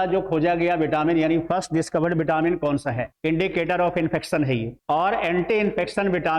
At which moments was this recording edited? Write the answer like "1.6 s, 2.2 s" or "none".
3.1 s